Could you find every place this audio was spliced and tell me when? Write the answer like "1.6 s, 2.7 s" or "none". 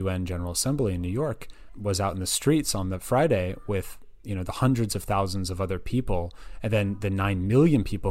none